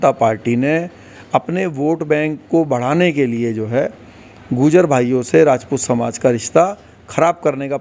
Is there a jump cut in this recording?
no; 0 cuts

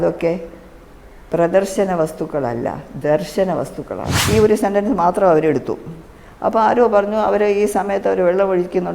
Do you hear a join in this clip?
yes; 1 cut; at 4.2 s

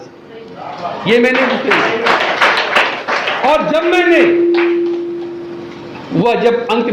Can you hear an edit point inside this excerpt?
no; 0 cuts

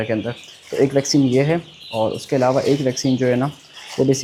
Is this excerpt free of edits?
yes; 0 cuts

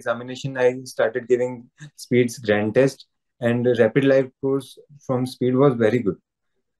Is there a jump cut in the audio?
no; 0 cuts

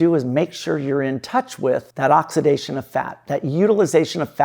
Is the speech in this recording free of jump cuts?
no; 1 cut; at 1.9 s

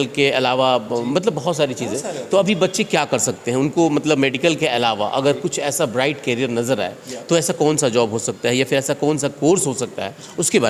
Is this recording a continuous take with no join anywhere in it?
yes; 0 cuts

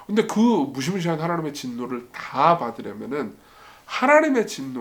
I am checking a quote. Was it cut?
no; 0 cuts

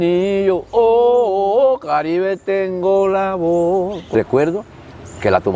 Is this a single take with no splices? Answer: no; 1 cut; at 4.0 s

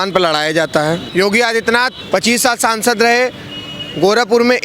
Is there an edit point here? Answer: yes; 2 cuts; at 1.0 s, 2.0 s

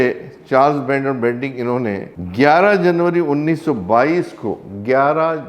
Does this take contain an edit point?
yes; 1 cut; at 2.2 s

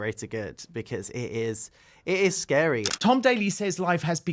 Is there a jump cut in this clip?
yes; 1 cut; at 2.9 s

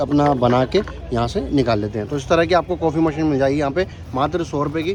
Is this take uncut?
yes; 0 cuts

